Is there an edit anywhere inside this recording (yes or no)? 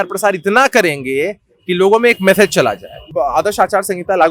yes